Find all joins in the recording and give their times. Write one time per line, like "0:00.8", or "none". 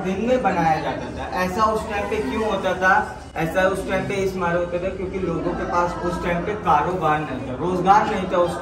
none